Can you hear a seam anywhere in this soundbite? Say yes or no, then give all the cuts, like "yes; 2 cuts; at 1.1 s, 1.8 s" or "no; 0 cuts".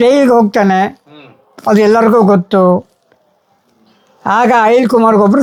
no; 0 cuts